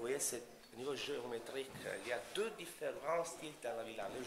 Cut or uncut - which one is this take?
cut